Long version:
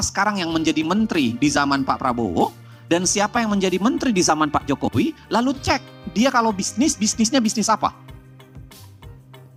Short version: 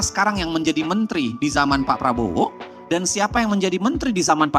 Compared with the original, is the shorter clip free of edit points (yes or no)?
yes